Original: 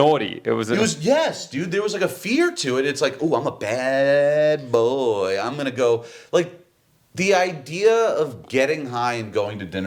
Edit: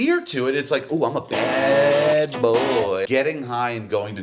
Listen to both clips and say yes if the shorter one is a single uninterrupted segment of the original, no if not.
no